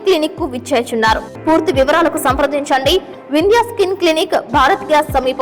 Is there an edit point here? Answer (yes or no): yes